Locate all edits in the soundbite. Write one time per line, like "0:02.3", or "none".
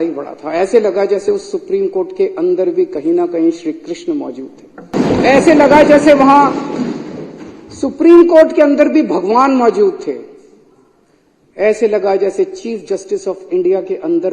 0:04.9